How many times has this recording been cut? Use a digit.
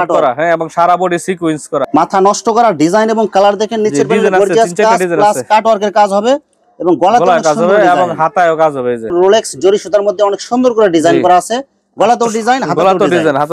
2